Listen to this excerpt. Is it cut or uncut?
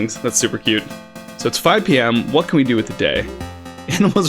cut